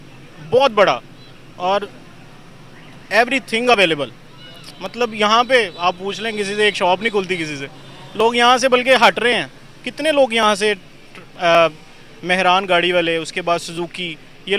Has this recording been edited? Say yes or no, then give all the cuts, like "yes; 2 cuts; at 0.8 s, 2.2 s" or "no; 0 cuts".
no; 0 cuts